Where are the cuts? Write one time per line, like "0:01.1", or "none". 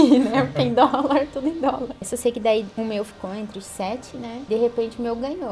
0:02.1
0:02.7
0:04.5